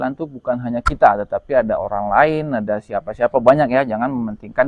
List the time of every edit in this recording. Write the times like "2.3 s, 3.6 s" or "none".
none